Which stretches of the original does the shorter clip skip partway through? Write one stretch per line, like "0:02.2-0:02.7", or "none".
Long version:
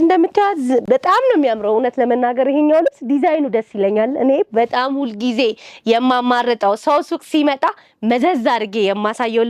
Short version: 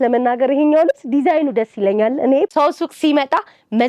0:04.5-0:06.8